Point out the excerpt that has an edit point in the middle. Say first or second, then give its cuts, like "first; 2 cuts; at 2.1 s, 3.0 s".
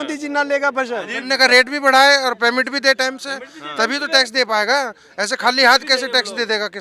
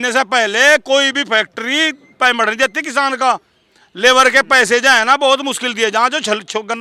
first; 1 cut; at 1.2 s